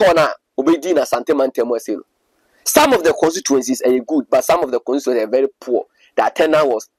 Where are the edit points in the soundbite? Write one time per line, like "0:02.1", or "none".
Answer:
none